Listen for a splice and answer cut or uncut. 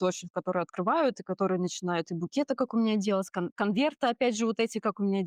uncut